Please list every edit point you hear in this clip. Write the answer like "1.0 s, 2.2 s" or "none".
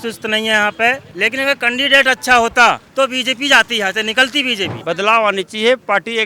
1.1 s, 2.8 s, 4.7 s

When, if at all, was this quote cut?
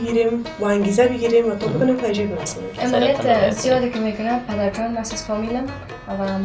2.6 s

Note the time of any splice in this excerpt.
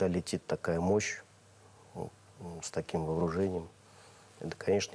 none

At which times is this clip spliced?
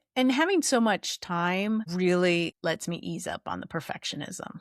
1.9 s, 2.5 s

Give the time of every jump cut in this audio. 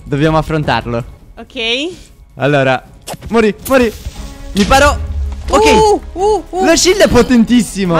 none

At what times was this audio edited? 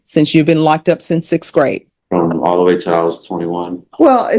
1.9 s

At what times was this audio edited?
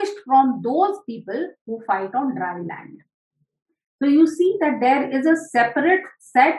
none

